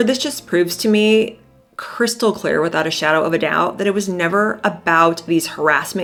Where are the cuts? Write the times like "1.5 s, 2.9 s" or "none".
none

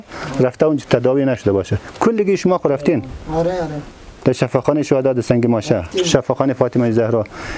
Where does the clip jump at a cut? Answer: none

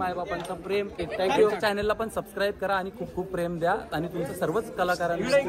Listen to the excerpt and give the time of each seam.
1.1 s

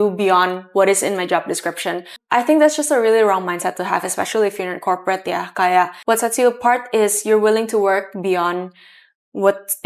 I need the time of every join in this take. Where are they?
2.1 s, 6.0 s

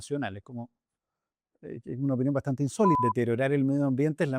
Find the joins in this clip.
3.0 s

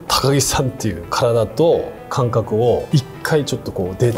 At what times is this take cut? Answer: 1.1 s, 2.9 s

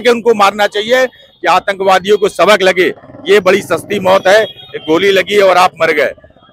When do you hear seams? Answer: none

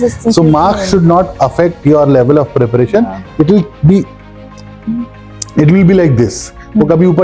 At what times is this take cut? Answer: none

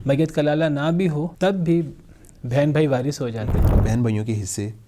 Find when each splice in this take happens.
1.3 s, 3.7 s

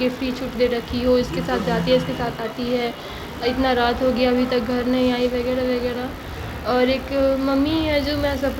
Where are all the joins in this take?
none

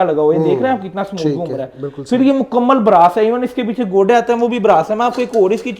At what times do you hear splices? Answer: none

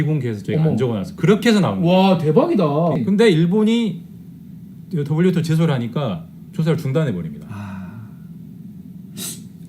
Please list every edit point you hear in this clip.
3.0 s

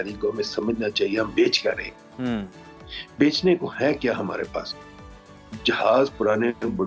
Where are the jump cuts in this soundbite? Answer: none

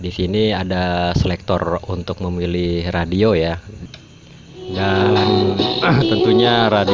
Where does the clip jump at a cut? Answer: 3.7 s

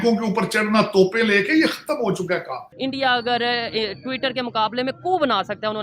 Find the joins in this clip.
2.6 s

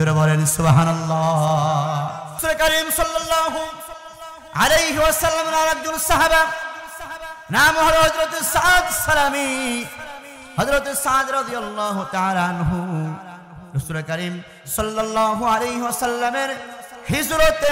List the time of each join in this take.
2.3 s

